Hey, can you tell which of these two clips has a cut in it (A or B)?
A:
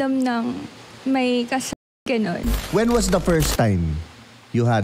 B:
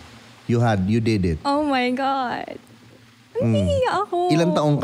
A